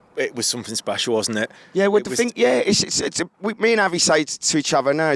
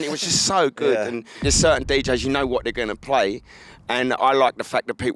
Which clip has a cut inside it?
second; 1 cut; at 1.4 s

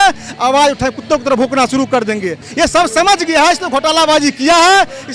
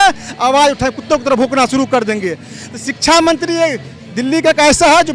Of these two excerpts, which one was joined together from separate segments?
first; 1 cut; at 2.4 s

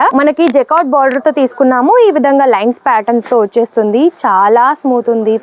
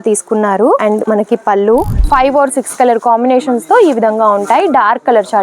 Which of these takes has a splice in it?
second; 1 cut; at 2.0 s

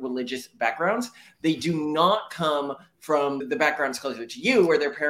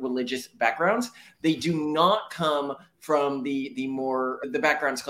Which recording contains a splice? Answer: first; 1 cut; at 3.4 s

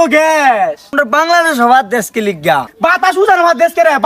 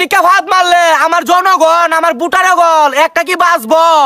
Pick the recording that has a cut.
first; 2 cuts; at 0.9 s, 2.7 s

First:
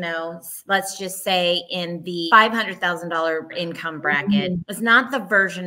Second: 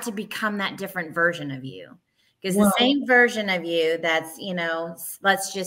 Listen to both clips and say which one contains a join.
first; 3 cuts; at 2.3 s, 3.5 s, 4.7 s

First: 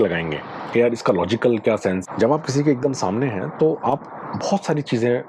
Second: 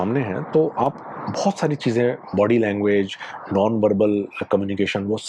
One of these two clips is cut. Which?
first; 1 cut; at 2.0 s

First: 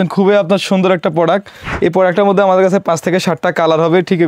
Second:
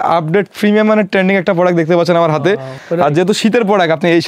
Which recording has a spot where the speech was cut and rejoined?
second; 1 cut; at 2.8 s

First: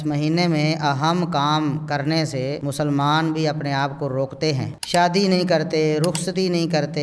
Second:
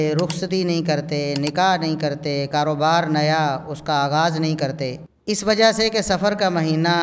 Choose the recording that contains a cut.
first; 1 cut; at 4.8 s

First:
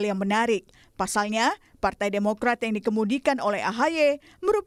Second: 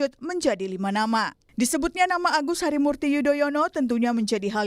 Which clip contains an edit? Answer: second; 1 cut; at 1.4 s

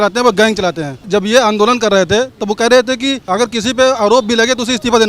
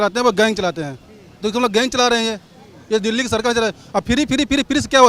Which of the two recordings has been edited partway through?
first; 2 cuts; at 1.0 s, 3.2 s

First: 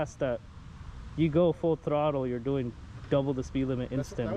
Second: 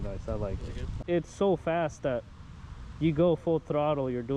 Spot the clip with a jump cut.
second; 1 cut; at 0.9 s

